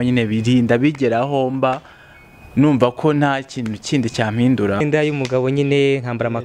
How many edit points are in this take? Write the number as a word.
one